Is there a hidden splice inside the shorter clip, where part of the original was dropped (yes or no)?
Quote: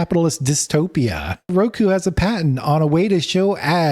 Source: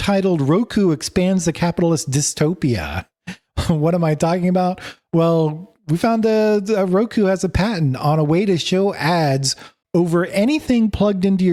yes